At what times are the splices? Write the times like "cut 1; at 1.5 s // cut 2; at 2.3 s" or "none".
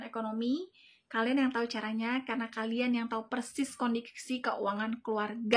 none